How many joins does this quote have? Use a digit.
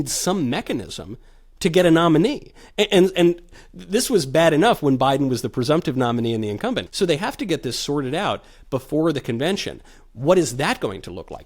1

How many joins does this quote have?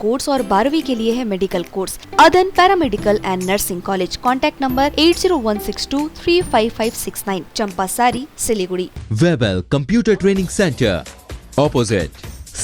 2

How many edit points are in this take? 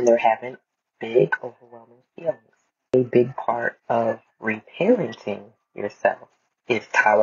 1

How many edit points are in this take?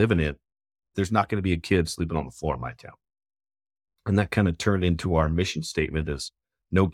1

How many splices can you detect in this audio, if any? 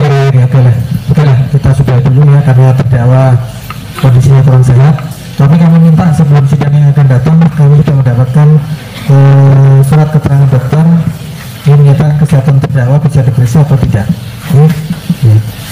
0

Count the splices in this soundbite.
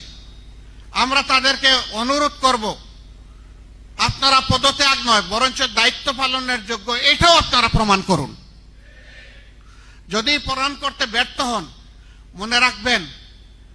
0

